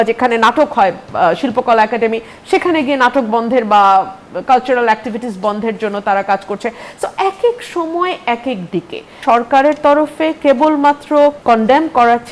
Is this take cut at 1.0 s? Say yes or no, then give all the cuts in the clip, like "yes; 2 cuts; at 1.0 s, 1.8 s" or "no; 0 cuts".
no; 2 cuts; at 9.1 s, 11.4 s